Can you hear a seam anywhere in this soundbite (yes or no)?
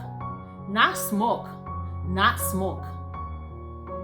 yes